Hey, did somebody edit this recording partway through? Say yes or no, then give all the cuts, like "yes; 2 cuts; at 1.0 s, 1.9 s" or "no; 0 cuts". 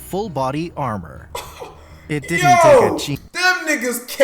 yes; 1 cut; at 3.2 s